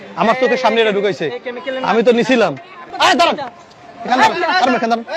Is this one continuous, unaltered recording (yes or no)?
no